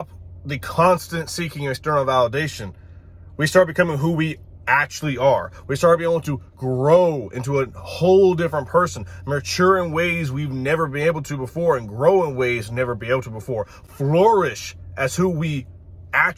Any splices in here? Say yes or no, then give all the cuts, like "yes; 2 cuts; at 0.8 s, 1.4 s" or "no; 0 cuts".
no; 0 cuts